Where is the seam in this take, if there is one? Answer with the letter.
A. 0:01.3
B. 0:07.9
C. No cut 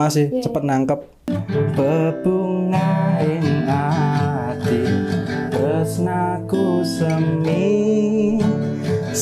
A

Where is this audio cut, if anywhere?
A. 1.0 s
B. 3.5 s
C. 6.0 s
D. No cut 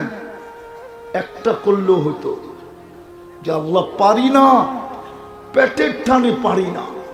D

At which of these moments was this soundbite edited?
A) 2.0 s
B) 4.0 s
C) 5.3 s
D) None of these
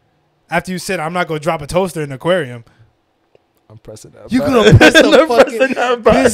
D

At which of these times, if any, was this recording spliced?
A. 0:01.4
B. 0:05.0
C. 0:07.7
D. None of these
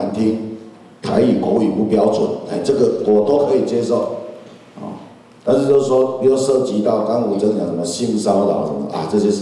D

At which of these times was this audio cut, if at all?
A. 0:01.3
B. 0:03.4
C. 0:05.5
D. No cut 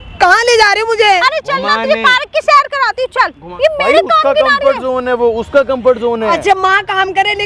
B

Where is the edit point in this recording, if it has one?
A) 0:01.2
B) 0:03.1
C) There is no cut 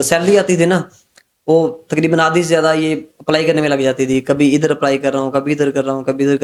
C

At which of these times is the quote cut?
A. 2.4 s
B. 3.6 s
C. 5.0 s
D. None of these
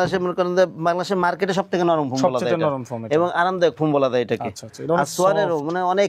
D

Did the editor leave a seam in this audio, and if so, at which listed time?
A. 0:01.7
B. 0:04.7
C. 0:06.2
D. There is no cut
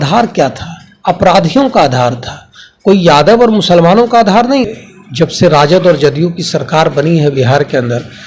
B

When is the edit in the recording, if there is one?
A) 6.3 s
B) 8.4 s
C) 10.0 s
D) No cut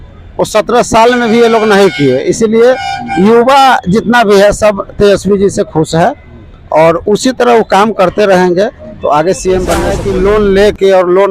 C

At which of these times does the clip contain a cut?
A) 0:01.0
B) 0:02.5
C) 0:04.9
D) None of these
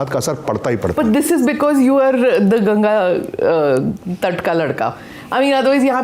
D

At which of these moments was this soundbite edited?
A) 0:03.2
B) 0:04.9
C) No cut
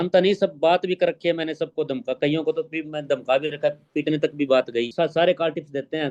B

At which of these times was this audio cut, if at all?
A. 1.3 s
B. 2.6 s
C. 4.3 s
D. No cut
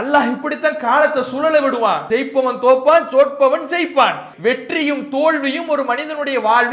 C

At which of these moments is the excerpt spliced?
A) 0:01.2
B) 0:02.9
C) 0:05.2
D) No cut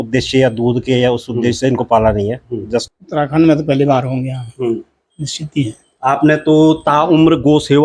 B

